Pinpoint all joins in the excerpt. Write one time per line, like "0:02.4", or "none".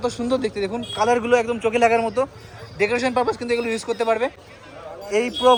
none